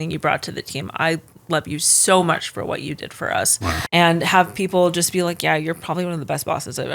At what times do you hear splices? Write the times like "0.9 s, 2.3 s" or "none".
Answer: 3.8 s